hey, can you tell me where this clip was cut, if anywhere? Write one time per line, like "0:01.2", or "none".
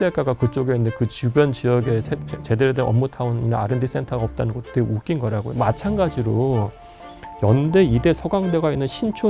0:05.5